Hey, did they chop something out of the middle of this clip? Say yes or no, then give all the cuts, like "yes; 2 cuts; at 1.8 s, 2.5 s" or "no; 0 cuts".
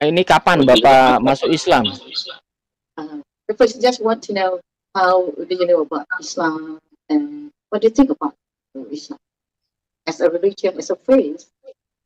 no; 0 cuts